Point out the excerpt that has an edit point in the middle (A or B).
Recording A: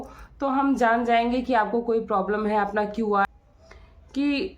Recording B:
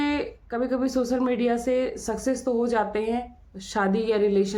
A